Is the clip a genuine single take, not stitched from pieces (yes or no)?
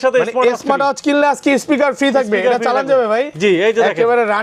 yes